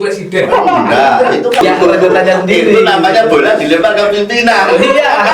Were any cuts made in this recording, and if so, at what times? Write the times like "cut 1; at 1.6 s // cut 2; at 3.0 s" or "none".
cut 1; at 1.6 s